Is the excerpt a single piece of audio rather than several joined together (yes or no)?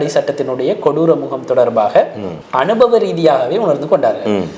yes